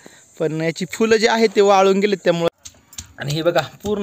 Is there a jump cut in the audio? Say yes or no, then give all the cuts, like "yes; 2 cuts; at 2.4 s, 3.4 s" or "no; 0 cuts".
yes; 1 cut; at 2.5 s